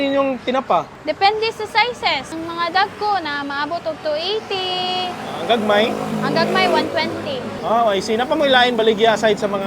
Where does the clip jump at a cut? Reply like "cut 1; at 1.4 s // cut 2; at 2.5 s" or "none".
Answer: cut 1; at 0.9 s // cut 2; at 2.3 s // cut 3; at 7.5 s